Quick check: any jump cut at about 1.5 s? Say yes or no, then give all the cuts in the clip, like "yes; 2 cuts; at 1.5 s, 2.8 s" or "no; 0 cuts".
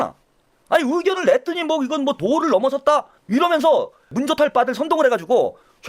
no; 2 cuts; at 3.1 s, 4.1 s